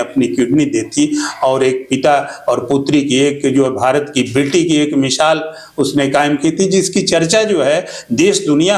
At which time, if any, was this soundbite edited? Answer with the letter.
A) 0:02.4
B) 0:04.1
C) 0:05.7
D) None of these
D